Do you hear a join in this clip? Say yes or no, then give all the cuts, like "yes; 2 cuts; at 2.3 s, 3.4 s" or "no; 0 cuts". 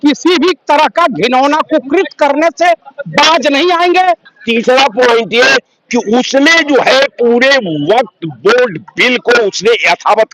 yes; 1 cut; at 4.3 s